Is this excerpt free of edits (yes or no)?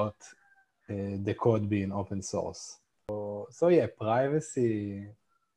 no